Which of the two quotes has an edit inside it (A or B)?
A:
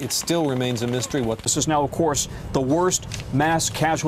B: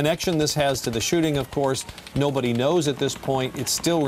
A